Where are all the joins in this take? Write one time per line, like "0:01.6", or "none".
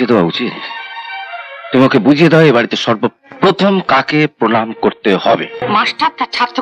0:05.6